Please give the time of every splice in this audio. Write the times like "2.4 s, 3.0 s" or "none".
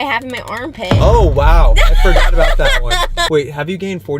3.3 s